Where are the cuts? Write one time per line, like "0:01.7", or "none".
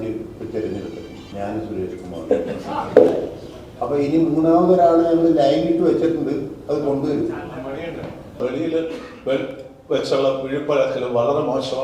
0:01.3
0:08.4